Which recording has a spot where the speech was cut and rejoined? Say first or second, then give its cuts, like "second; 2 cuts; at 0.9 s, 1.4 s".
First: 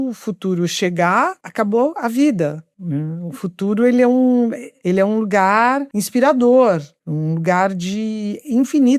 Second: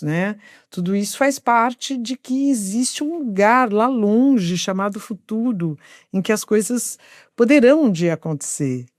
first; 3 cuts; at 2.7 s, 4.7 s, 5.9 s